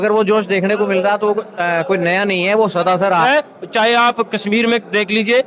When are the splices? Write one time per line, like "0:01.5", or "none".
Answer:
0:03.2

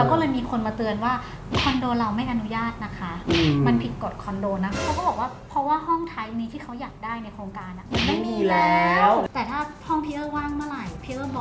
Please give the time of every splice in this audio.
0:04.8
0:09.2

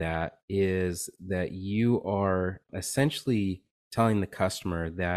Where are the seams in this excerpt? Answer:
0:02.7

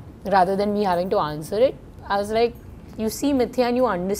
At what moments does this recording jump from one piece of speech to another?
none

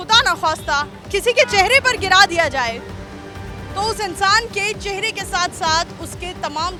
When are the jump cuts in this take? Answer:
none

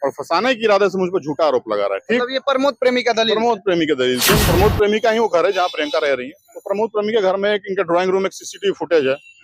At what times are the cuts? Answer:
0:04.4

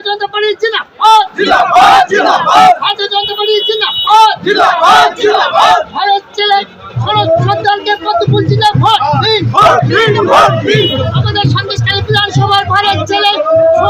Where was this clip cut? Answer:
none

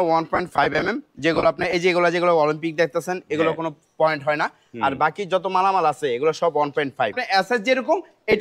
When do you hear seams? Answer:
0:07.2

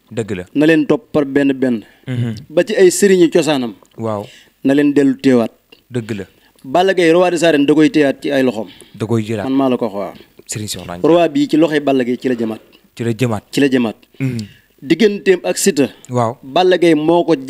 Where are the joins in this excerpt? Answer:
none

